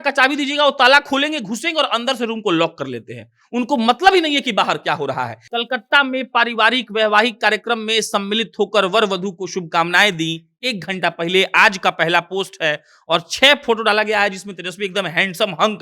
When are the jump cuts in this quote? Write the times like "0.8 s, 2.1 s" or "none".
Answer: 5.4 s